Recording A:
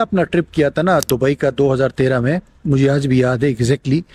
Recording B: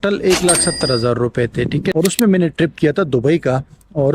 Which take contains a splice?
B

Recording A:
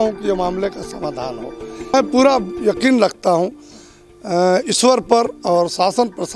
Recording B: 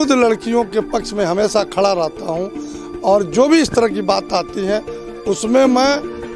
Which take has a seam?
A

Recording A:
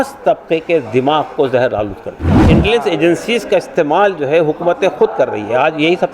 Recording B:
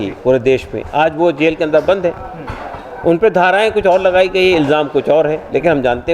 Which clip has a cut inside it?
A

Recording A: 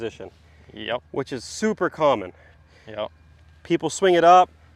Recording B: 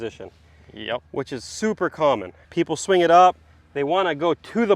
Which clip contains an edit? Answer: B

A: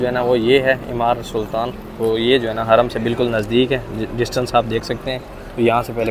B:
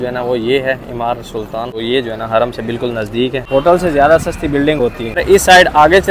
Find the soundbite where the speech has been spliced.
B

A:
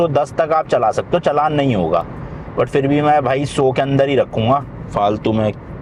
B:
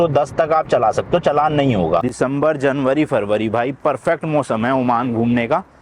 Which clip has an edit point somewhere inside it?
B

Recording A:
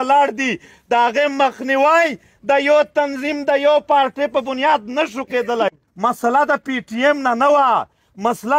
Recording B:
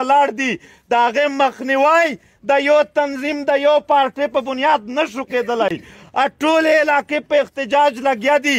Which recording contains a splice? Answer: A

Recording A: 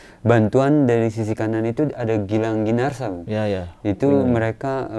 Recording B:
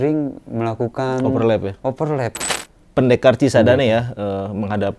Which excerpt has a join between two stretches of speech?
B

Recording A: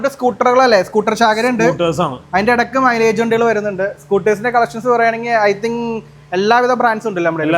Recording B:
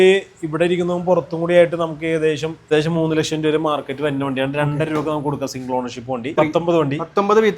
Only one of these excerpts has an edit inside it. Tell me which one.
B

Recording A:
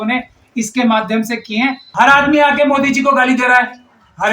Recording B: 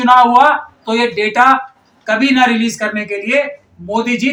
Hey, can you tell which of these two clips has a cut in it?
A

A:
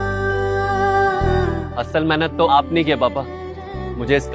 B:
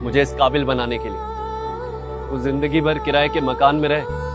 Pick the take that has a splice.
A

